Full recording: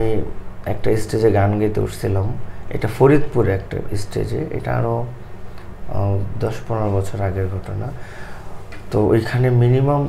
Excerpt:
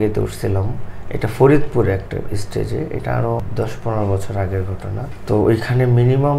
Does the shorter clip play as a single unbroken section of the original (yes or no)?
no